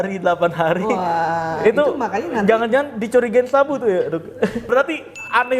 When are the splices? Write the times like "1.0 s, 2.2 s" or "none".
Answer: 4.7 s